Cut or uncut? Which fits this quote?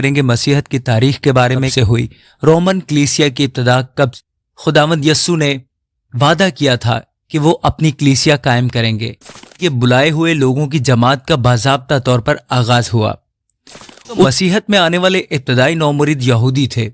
cut